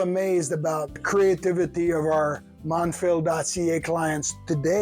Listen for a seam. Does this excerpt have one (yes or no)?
yes